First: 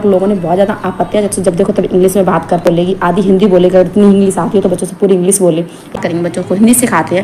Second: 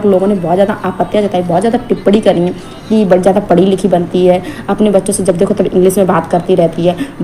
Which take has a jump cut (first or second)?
first